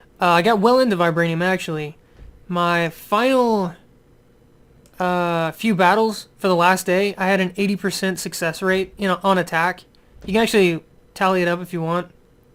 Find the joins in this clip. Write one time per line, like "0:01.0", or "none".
none